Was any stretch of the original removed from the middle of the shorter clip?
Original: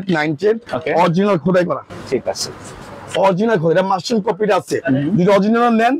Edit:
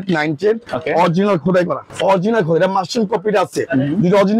yes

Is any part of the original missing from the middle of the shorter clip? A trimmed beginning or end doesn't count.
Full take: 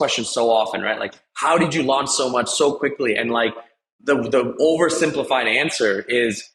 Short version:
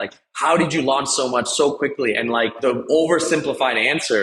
yes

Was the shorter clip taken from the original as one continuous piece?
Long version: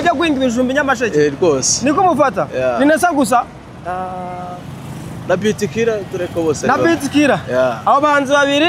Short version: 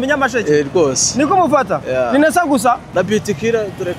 no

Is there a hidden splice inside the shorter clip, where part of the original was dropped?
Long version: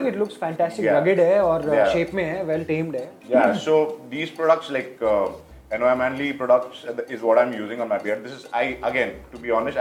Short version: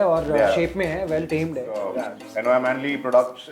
yes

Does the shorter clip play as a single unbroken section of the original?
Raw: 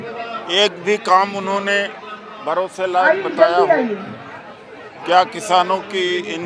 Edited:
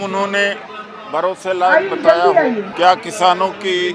no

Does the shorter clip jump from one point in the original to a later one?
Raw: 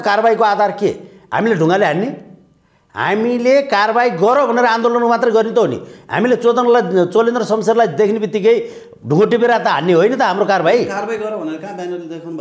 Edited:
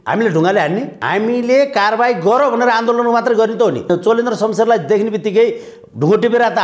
yes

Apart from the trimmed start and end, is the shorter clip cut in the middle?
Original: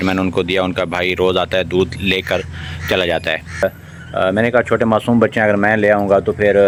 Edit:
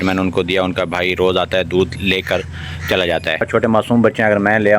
yes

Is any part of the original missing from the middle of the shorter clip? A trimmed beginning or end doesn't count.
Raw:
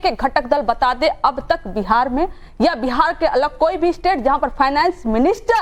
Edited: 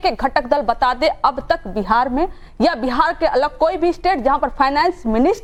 no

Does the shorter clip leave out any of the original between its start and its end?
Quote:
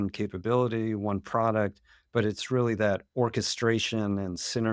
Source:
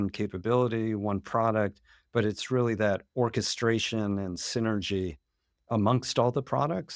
no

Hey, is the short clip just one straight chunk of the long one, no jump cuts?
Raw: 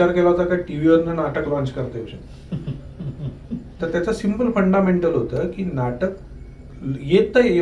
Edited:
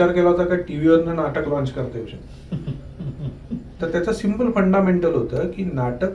yes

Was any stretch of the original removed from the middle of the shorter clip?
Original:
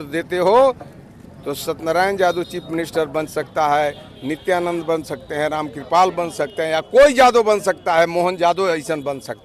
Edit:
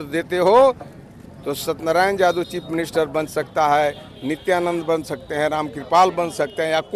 no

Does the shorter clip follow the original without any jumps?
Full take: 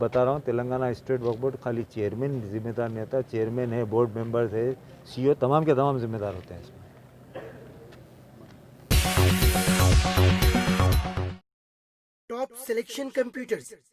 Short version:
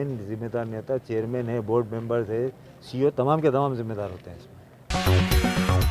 no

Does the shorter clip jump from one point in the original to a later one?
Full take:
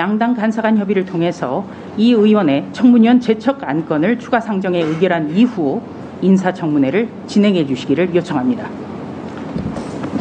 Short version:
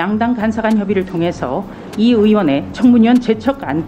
no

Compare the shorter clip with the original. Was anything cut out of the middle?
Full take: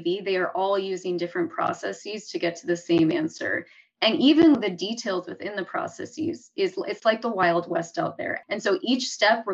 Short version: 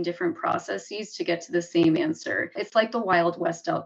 yes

